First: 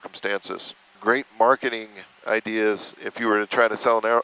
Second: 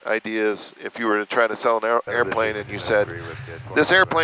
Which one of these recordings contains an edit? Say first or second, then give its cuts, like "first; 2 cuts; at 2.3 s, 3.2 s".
first; 1 cut; at 1.0 s